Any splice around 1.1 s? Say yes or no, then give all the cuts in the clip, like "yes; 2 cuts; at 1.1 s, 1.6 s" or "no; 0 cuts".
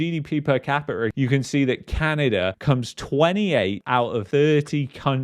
yes; 1 cut; at 1.1 s